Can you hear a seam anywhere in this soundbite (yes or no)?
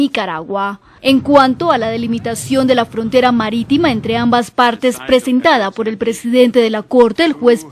yes